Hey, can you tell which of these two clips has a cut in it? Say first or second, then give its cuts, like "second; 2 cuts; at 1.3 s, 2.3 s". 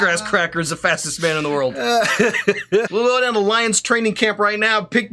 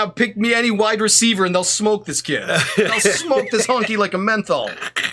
first; 1 cut; at 2.9 s